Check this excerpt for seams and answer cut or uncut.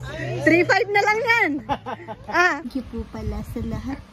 cut